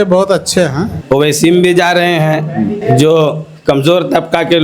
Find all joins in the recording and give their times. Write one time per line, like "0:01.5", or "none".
0:00.9
0:02.8